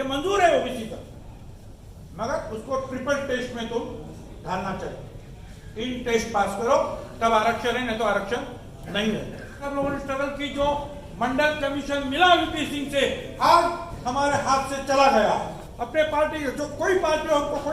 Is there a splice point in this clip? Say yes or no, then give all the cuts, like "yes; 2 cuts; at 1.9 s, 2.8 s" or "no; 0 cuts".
yes; 2 cuts; at 9.7 s, 15.6 s